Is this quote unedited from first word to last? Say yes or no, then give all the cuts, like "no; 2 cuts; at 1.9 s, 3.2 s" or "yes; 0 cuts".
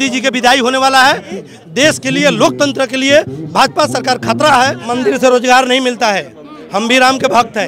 no; 2 cuts; at 1.4 s, 4.8 s